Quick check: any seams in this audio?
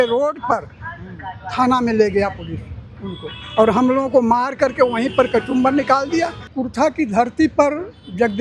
yes; 1 cut; at 6.5 s

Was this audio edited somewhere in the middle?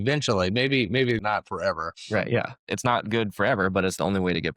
yes; 2 cuts; at 1.2 s, 2.6 s

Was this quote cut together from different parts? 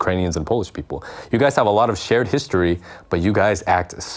no; 0 cuts

